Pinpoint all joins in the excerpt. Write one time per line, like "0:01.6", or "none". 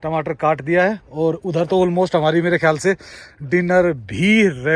none